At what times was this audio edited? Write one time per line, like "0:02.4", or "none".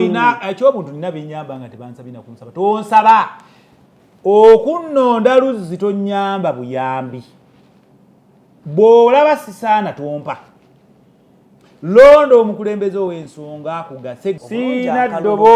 0:14.4